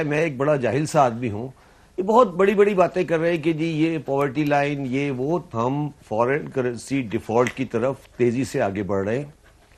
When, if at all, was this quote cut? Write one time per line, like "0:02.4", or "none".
0:05.5